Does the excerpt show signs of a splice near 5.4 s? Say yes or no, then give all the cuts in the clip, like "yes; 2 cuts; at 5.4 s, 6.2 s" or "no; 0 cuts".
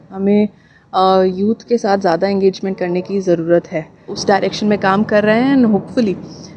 no; 1 cut; at 4.2 s